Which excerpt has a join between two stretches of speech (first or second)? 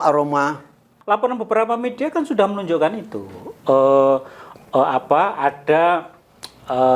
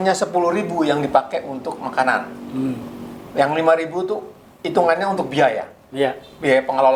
first